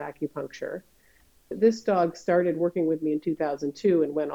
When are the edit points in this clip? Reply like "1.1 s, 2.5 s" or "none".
1.5 s